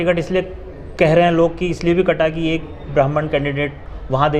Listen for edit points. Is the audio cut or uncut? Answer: uncut